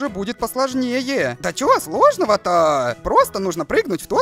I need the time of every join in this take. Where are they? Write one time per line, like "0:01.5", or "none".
0:01.5
0:03.0